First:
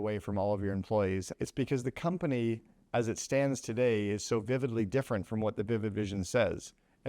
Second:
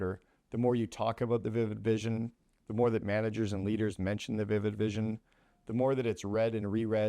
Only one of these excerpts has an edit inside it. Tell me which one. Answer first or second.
first